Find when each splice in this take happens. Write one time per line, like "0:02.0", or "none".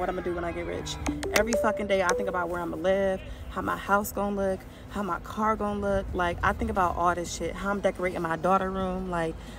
none